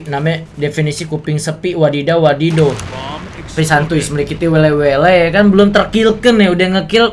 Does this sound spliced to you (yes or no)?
no